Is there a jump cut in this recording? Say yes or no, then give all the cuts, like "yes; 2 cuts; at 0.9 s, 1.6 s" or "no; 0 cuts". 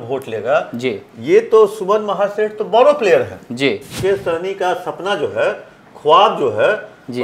yes; 1 cut; at 3.9 s